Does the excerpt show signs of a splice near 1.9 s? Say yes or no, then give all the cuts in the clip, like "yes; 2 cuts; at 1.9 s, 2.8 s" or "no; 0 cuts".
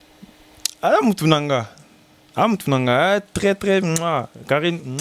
yes; 1 cut; at 1.9 s